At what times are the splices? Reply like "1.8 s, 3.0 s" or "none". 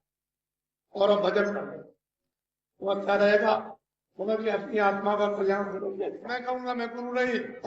6.3 s